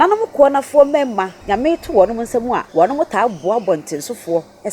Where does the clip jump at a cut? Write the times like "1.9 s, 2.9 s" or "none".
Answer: 1.3 s, 2.7 s